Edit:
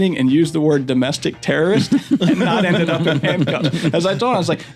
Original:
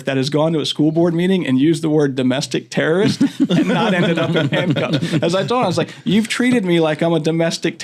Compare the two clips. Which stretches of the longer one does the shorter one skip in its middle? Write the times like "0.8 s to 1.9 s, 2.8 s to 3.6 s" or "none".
none